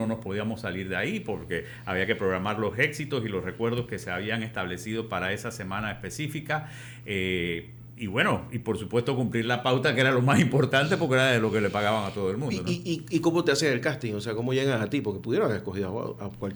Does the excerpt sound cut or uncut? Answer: uncut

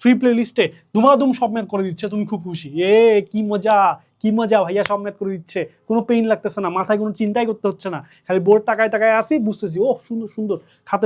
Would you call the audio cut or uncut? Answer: uncut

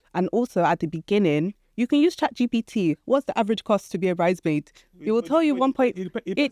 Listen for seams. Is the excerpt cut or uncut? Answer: uncut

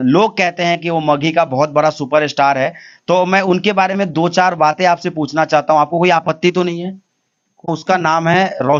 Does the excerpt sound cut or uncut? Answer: cut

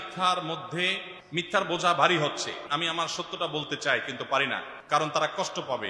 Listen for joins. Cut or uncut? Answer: cut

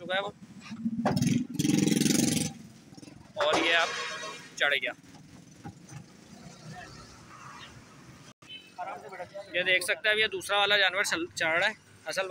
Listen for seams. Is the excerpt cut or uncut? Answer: uncut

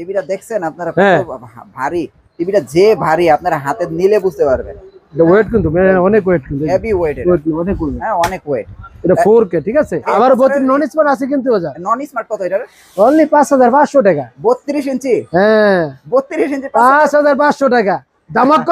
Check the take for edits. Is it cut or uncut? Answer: cut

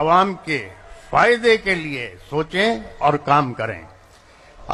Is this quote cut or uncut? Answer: uncut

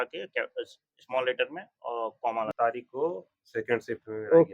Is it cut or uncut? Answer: cut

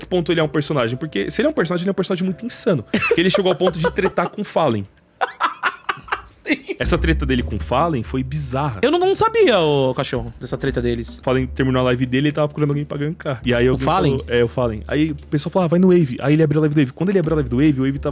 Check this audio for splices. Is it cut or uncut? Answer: cut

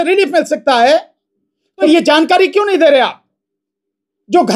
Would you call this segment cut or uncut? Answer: cut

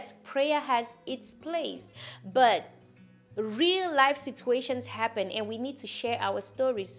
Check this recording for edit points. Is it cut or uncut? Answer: uncut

